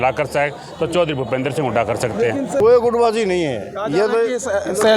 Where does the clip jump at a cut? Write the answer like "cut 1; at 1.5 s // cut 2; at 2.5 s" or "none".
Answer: cut 1; at 2.6 s